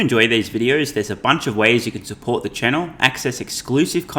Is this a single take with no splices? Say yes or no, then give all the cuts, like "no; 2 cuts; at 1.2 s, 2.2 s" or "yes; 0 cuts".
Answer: yes; 0 cuts